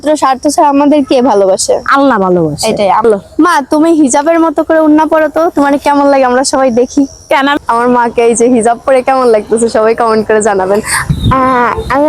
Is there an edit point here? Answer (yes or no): yes